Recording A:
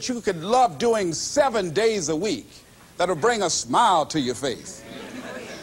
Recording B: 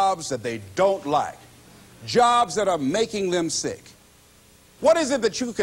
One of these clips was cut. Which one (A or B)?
B